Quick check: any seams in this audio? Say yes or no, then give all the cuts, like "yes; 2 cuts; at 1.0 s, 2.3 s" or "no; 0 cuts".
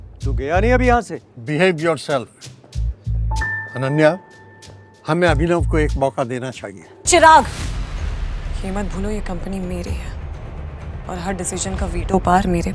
yes; 1 cut; at 6.9 s